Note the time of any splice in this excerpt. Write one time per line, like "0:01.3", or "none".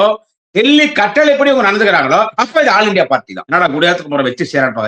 0:03.4

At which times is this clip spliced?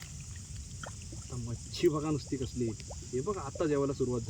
none

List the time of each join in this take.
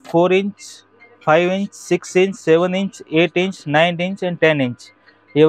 none

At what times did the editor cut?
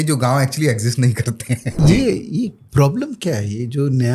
0:01.8

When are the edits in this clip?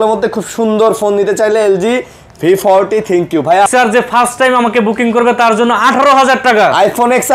0:03.7

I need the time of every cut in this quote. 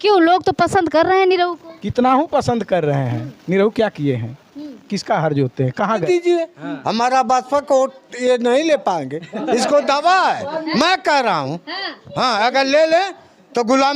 0:06.0

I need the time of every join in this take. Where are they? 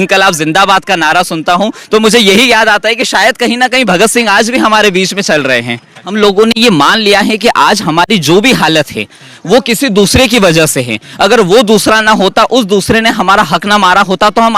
0:06.1

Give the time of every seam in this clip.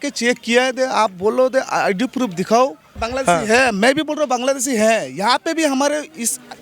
0:03.0

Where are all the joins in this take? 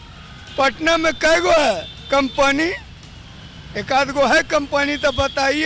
none

